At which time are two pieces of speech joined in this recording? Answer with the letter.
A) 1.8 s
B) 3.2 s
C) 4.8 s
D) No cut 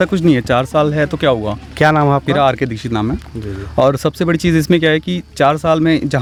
D